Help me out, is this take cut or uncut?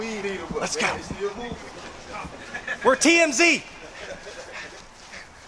uncut